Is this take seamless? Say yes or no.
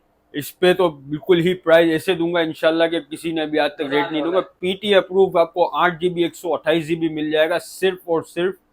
yes